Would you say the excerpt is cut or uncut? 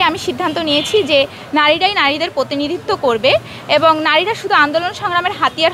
uncut